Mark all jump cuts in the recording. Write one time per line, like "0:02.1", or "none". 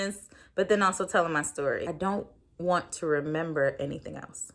0:01.9